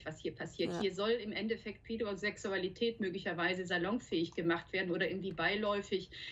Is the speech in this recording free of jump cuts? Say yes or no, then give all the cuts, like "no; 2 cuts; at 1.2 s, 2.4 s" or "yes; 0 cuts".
yes; 0 cuts